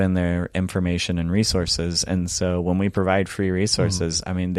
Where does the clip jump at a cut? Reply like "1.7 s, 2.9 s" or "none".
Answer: none